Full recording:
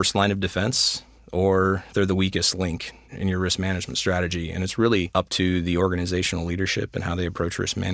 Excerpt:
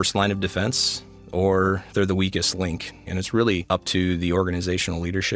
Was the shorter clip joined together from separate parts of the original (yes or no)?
yes